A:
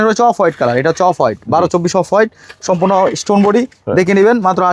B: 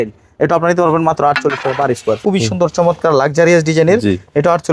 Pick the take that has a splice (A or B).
B